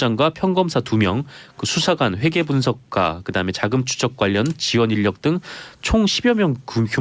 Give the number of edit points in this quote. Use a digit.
1